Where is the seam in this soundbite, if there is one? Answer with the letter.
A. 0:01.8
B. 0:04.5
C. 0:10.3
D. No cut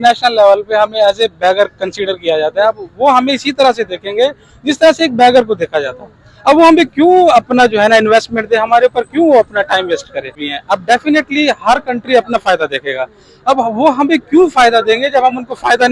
C